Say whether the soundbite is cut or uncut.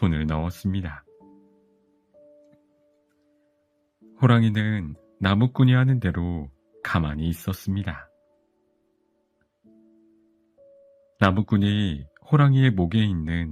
uncut